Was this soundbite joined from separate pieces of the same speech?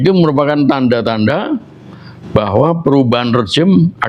no; 0 cuts

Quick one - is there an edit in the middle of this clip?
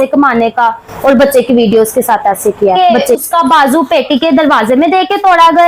yes; 1 cut; at 2.8 s

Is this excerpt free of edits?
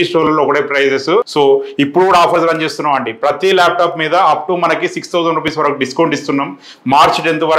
no; 1 cut; at 1.3 s

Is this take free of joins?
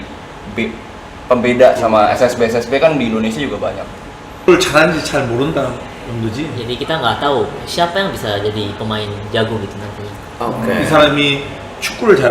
no; 1 cut; at 4.5 s

